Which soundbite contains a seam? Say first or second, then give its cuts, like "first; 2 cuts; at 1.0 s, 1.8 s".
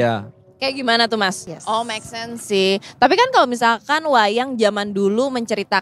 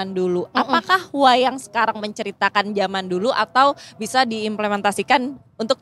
first; 1 cut; at 1.5 s